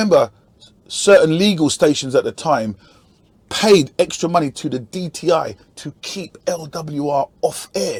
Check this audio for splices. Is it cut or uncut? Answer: uncut